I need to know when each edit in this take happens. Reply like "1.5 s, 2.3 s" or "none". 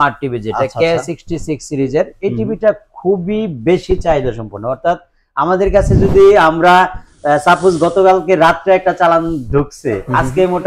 none